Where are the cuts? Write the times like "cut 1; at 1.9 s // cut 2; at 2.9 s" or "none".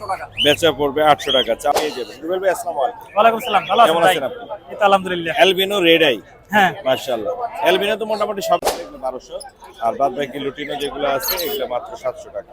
cut 1; at 1.7 s // cut 2; at 8.6 s